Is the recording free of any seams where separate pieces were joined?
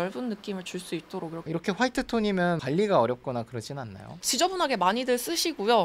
yes; 0 cuts

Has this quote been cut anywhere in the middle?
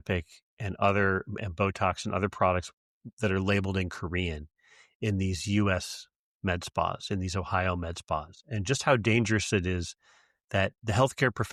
no; 0 cuts

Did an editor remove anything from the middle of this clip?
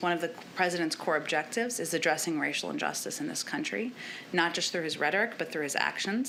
no; 0 cuts

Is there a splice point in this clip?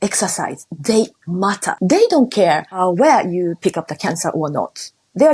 yes; 2 cuts; at 1.7 s, 2.7 s

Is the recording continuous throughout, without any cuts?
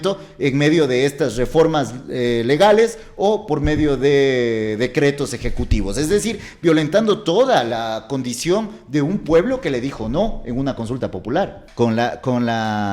no; 1 cut; at 11.6 s

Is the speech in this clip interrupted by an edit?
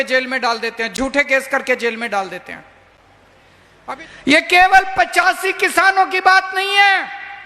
yes; 1 cut; at 3.7 s

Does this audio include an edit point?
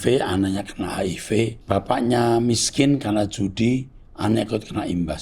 yes; 1 cut; at 1.6 s

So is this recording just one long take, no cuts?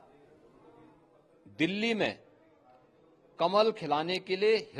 yes; 0 cuts

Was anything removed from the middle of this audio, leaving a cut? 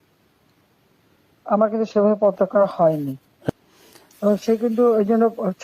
yes; 1 cut; at 3.5 s

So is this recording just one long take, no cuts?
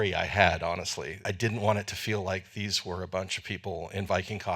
no; 1 cut; at 1.1 s

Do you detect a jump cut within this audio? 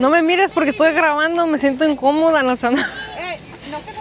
no; 0 cuts

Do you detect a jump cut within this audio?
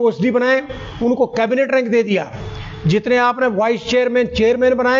no; 0 cuts

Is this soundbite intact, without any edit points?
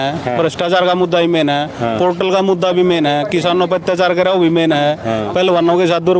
yes; 0 cuts

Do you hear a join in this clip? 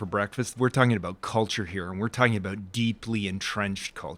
no; 0 cuts

